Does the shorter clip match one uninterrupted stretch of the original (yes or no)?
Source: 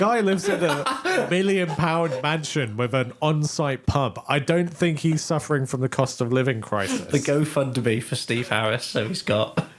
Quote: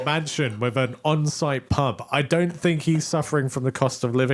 yes